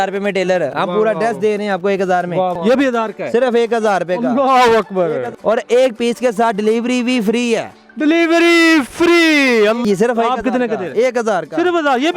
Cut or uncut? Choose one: cut